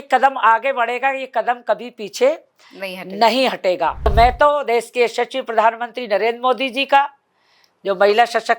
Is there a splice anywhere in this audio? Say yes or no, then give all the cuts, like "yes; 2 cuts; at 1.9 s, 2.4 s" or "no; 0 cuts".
yes; 1 cut; at 4.1 s